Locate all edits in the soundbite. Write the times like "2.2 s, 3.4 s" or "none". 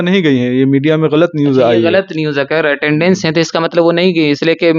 none

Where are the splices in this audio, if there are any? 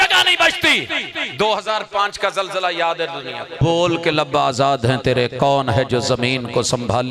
3.6 s

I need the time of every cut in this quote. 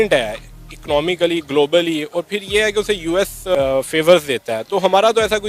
3.6 s

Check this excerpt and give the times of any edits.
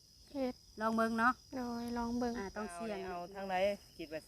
3.2 s

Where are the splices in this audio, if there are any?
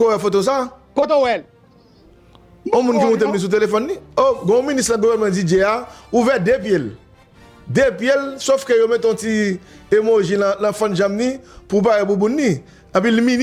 none

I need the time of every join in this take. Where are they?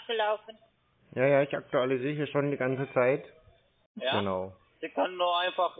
4.0 s

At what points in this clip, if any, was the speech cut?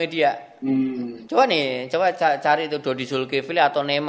1.2 s

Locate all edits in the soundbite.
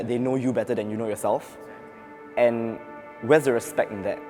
none

